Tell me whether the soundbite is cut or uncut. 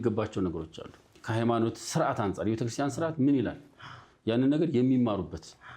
cut